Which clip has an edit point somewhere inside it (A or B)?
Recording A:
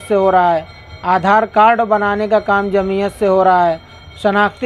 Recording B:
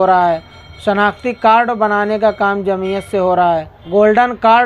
B